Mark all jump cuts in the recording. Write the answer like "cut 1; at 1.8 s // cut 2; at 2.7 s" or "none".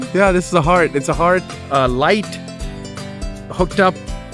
none